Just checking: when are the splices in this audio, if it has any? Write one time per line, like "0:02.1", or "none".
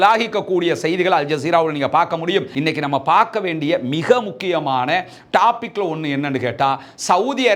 0:02.5